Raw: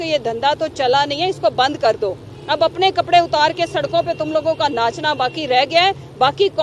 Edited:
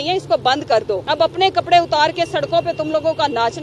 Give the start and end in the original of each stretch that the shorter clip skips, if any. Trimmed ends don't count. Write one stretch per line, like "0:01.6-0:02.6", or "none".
0:02.1-0:02.4